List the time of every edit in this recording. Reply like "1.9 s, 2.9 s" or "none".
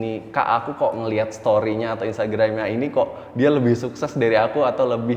none